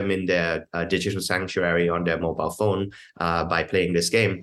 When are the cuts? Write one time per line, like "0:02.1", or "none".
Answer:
none